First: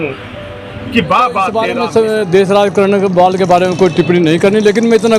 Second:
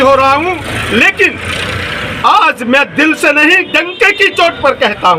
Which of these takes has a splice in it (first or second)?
first